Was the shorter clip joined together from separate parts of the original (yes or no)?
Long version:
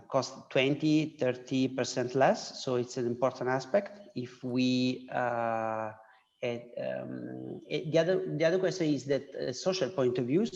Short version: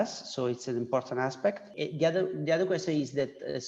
yes